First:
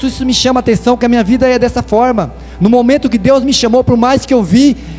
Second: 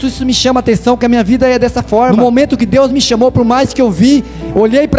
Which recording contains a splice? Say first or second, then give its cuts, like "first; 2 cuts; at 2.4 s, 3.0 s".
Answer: second; 1 cut; at 2.1 s